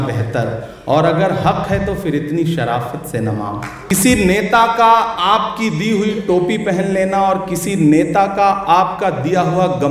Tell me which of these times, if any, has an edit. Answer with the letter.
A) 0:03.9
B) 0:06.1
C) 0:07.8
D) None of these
A